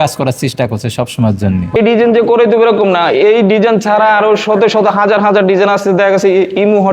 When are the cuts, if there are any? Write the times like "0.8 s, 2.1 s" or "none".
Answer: 1.8 s